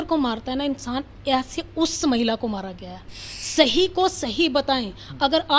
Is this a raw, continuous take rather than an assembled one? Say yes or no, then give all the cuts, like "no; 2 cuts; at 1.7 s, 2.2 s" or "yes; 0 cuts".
no; 1 cut; at 3.3 s